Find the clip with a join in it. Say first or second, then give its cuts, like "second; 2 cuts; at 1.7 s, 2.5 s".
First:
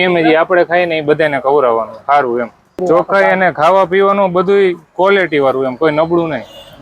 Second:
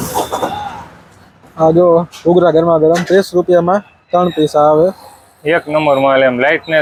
first; 1 cut; at 2.8 s